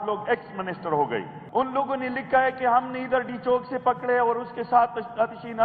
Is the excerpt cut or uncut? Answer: cut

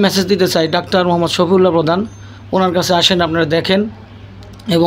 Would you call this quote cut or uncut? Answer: uncut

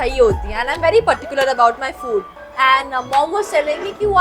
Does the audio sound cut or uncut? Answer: cut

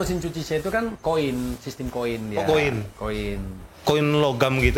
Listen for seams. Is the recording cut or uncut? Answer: cut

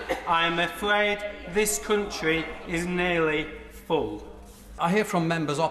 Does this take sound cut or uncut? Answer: uncut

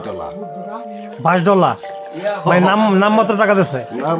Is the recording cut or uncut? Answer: uncut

